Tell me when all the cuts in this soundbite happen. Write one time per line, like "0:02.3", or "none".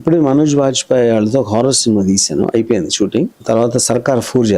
0:03.3